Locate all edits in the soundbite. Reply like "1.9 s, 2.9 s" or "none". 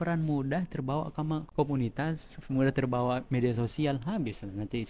1.5 s